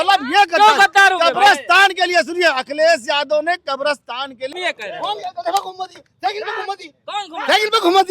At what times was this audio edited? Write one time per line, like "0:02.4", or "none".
0:04.5